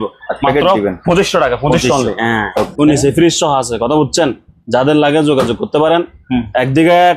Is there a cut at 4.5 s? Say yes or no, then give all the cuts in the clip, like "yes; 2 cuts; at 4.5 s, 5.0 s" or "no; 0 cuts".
no; 1 cut; at 2.7 s